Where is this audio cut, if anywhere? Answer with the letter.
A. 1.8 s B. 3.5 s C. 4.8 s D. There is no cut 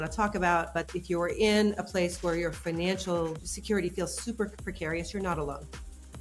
B